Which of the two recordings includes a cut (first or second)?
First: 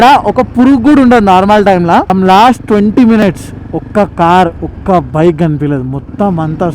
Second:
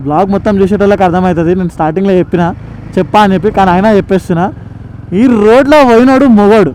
first